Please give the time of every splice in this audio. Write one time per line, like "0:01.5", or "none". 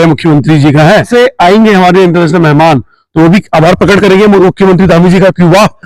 0:01.1